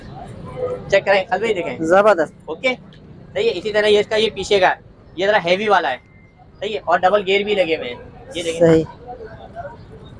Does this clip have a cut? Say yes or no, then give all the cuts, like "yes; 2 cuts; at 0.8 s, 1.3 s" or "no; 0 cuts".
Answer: no; 0 cuts